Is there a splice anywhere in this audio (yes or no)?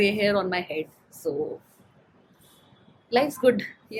no